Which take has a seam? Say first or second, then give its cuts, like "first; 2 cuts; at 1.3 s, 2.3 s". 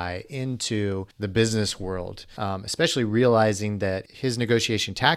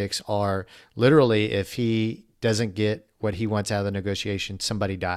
first; 3 cuts; at 1.1 s, 2.3 s, 4.0 s